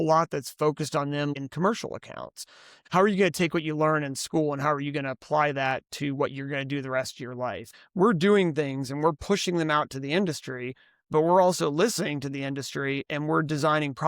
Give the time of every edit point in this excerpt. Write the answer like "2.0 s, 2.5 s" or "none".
1.3 s, 2.8 s, 7.8 s